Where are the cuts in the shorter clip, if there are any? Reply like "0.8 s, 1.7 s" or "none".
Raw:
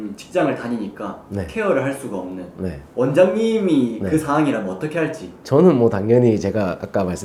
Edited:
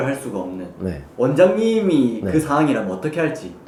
none